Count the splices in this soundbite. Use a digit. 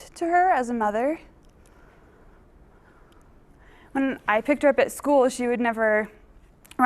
1